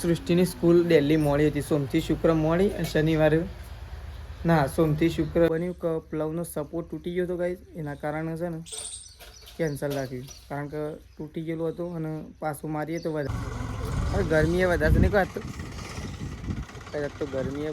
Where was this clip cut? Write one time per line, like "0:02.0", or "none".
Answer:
0:05.5
0:13.3